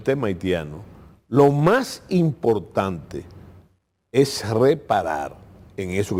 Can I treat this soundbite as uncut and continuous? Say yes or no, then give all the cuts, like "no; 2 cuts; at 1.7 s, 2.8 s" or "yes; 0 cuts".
yes; 0 cuts